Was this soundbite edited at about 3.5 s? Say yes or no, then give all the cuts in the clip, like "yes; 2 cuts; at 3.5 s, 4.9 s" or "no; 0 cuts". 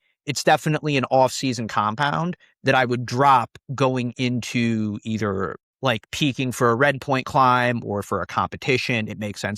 no; 1 cut; at 5.6 s